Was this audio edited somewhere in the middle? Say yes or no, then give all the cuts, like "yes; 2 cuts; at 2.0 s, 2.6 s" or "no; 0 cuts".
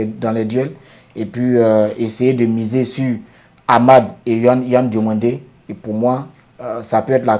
no; 0 cuts